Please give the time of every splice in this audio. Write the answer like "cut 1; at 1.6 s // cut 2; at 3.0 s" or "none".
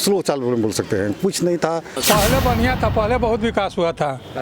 cut 1; at 2.0 s